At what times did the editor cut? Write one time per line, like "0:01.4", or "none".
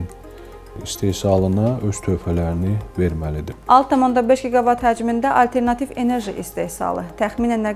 0:03.5